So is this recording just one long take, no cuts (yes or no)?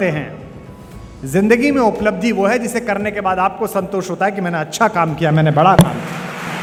yes